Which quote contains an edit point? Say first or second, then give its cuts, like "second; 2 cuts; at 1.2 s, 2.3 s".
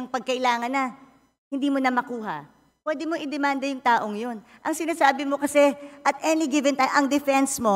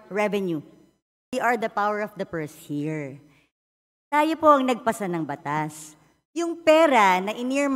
second; 1 cut; at 1.3 s